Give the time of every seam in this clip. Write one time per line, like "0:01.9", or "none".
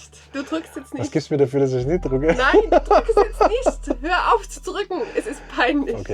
none